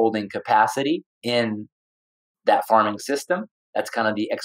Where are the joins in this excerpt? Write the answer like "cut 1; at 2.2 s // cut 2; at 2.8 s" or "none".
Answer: cut 1; at 1.1 s // cut 2; at 3.6 s